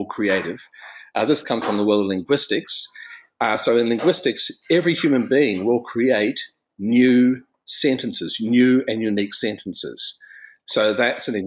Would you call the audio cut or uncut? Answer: uncut